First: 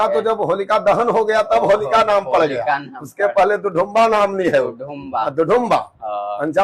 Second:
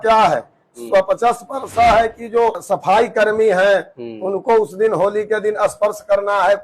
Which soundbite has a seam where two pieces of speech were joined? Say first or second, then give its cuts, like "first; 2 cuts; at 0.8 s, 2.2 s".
second; 1 cut; at 2.6 s